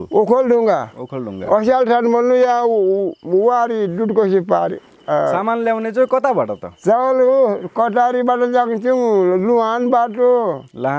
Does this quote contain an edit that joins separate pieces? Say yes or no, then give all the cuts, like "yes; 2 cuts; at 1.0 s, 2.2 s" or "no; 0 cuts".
no; 0 cuts